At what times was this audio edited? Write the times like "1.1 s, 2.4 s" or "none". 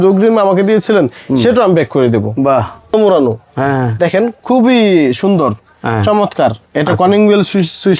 2.9 s